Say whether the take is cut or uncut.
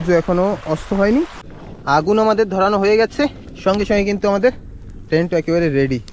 cut